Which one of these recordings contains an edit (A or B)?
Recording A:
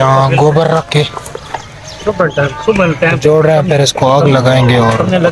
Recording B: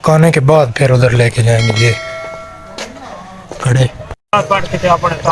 B